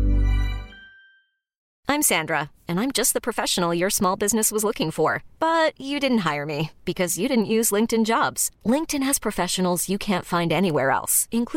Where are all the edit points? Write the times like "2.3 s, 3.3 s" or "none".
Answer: 1.6 s